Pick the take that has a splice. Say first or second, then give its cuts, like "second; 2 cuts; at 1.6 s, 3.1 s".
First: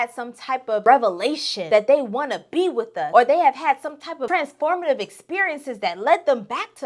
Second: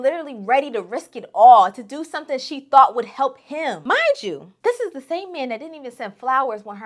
first; 4 cuts; at 0.8 s, 1.5 s, 3.0 s, 4.2 s